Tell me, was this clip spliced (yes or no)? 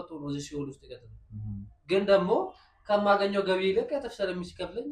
no